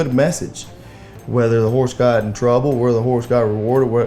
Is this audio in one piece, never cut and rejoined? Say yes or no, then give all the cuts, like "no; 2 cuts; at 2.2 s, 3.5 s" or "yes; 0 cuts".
yes; 0 cuts